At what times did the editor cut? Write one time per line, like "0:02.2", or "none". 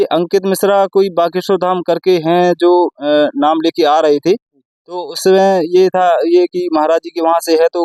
none